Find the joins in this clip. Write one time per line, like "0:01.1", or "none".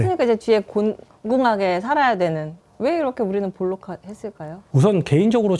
0:02.6
0:04.5